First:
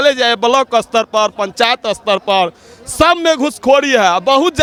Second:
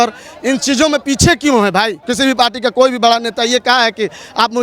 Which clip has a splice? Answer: second; 1 cut; at 2.0 s

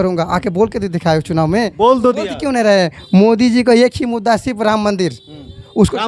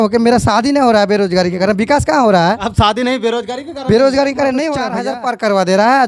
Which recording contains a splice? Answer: second; 1 cut; at 4.9 s

